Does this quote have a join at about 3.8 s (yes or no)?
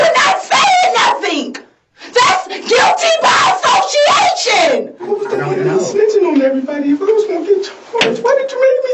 no